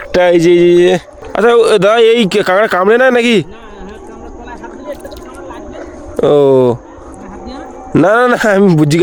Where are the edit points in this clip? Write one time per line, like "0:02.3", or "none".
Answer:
none